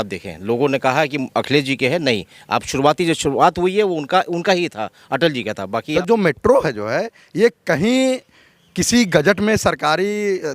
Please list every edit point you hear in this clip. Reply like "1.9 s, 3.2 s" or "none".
5.9 s